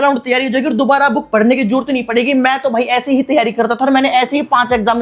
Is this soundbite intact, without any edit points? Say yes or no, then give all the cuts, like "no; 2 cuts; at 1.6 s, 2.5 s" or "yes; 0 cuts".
yes; 0 cuts